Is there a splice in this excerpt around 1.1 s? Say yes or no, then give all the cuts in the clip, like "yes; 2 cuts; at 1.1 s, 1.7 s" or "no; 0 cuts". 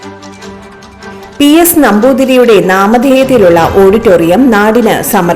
yes; 1 cut; at 1.1 s